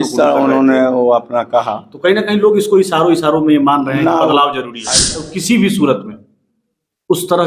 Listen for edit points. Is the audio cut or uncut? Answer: cut